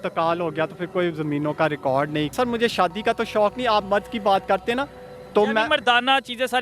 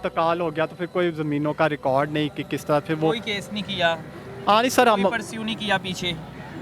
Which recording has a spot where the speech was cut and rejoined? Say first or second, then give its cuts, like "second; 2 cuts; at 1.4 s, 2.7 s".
first; 1 cut; at 2.3 s